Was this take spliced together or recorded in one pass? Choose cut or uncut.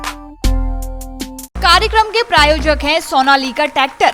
cut